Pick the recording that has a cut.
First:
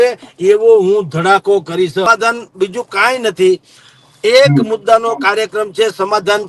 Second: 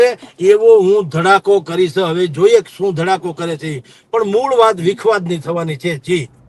first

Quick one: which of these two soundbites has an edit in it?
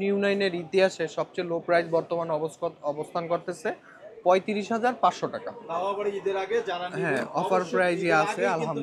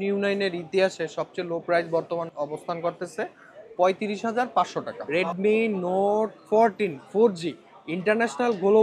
second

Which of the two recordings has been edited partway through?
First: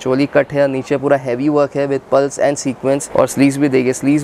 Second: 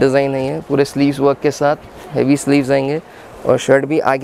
first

